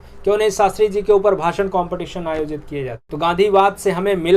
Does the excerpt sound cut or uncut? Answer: cut